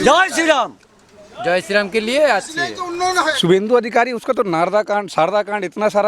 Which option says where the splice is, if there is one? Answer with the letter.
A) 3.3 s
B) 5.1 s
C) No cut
A